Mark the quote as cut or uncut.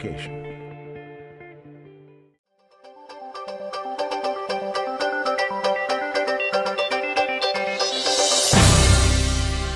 cut